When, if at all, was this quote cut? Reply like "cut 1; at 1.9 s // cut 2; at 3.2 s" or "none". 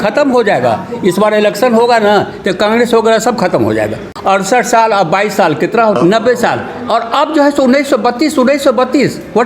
cut 1; at 4.0 s // cut 2; at 6.0 s